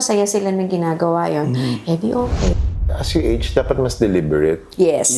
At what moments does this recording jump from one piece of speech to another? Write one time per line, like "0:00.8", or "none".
0:02.7

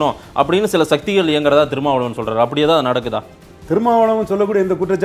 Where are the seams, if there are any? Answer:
none

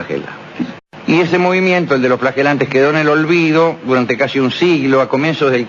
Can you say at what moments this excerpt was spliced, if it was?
none

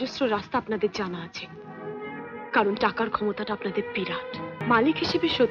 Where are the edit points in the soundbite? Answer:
0:04.6

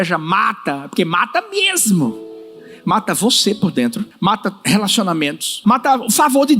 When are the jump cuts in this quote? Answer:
0:04.1
0:05.6

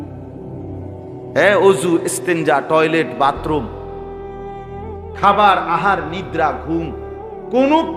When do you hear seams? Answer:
0:03.7
0:05.2

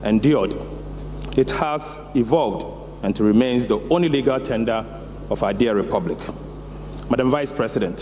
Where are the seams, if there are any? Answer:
none

